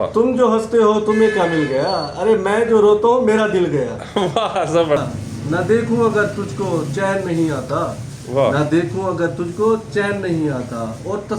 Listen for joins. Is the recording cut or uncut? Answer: cut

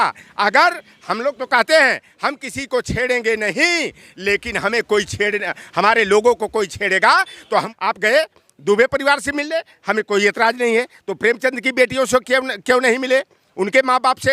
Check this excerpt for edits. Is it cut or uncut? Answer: cut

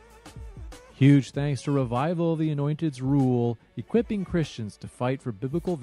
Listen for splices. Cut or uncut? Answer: cut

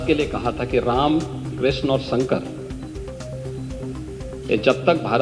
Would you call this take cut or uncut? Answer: uncut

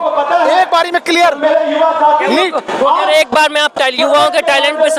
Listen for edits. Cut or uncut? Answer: uncut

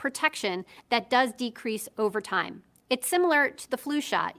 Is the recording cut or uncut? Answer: cut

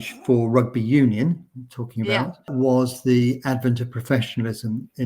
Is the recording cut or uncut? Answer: cut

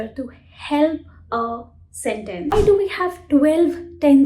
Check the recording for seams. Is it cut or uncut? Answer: cut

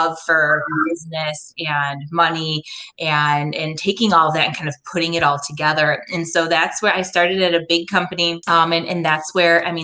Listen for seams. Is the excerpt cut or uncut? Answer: cut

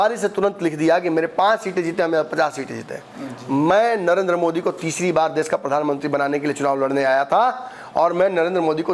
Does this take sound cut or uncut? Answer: uncut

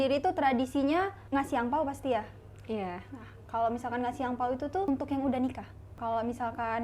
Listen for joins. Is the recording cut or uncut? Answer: cut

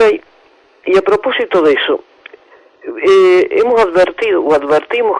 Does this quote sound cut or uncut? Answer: cut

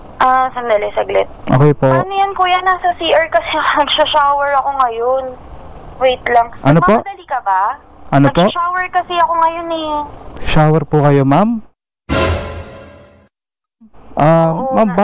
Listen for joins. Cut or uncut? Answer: uncut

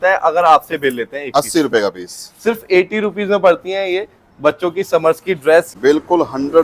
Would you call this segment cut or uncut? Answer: cut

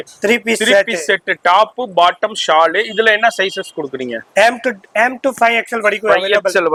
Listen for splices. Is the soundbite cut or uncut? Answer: uncut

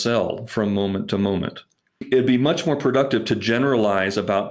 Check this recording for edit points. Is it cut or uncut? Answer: uncut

